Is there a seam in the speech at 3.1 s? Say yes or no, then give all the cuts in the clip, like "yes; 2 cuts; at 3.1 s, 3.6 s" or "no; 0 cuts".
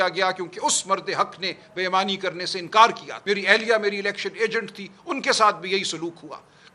yes; 1 cut; at 3.1 s